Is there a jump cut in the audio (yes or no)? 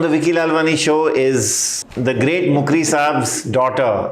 no